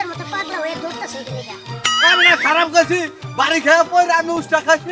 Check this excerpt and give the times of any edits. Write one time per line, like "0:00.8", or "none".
none